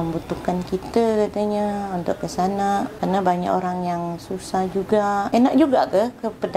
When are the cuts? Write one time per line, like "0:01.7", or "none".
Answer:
0:02.9
0:05.3